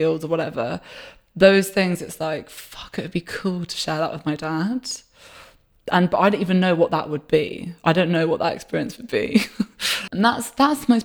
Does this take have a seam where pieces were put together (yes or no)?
yes